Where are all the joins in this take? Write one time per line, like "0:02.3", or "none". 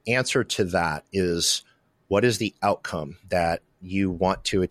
0:03.1

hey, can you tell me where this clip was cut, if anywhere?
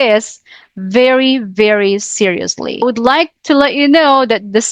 0:02.8

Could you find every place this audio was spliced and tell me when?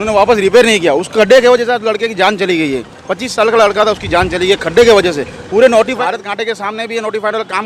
0:05.9

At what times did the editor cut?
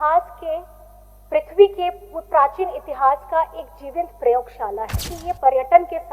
0:05.2

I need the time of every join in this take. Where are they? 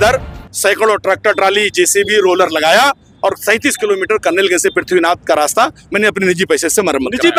none

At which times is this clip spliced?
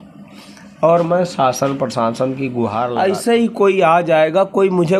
0:03.0

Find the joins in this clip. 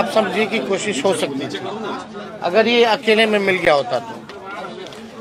none

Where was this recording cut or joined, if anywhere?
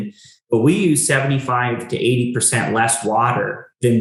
none

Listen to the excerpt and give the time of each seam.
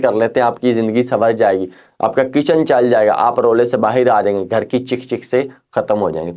none

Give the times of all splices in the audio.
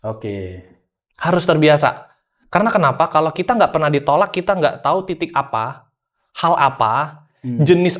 none

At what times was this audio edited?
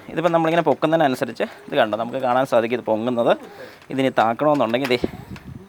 none

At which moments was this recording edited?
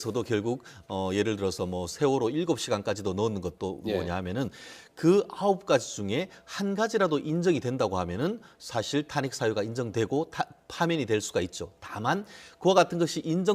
0:07.1

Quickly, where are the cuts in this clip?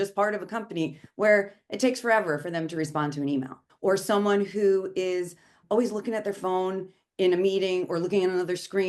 0:03.6

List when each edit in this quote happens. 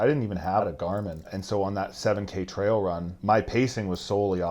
0:01.3
0:03.1

